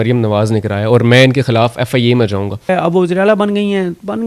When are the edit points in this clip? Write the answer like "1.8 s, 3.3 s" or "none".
2.7 s